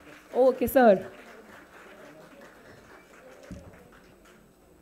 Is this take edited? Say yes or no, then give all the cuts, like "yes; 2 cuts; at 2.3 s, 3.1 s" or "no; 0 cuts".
no; 0 cuts